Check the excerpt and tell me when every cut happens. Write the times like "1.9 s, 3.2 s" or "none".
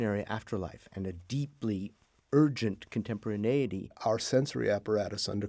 4.0 s